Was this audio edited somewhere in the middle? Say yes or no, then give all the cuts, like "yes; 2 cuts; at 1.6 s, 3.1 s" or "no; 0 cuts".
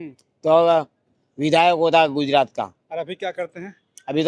yes; 1 cut; at 2.8 s